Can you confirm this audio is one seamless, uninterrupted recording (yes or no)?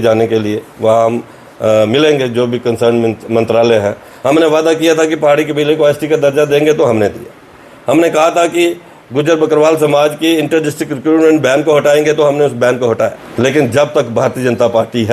no